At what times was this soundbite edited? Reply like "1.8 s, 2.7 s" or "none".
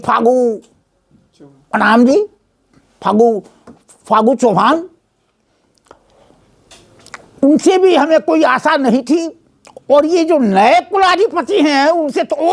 none